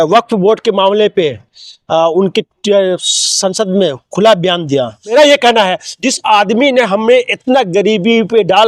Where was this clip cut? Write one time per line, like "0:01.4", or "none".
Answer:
0:05.1